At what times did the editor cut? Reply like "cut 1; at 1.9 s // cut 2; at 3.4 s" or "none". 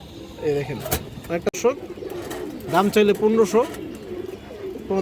cut 1; at 1.5 s